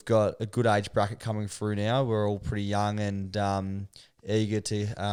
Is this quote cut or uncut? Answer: uncut